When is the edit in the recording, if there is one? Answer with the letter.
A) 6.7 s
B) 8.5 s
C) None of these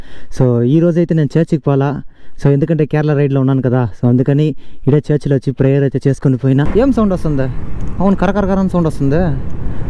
A